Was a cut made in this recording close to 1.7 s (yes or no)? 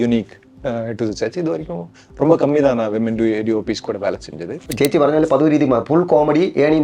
no